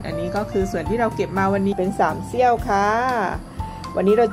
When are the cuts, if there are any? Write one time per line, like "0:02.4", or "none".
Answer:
0:01.7